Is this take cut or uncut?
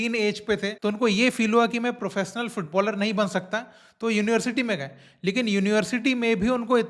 uncut